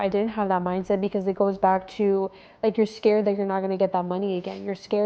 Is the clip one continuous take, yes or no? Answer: yes